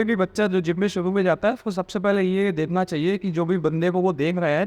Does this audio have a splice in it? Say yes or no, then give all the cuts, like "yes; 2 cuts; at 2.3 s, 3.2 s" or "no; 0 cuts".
no; 0 cuts